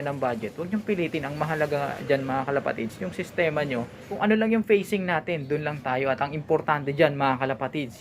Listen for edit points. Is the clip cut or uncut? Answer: cut